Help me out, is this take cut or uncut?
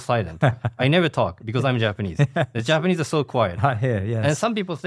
uncut